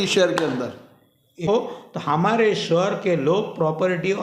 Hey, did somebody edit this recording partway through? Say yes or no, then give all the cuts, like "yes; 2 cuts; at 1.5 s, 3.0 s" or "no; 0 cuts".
yes; 1 cut; at 1.5 s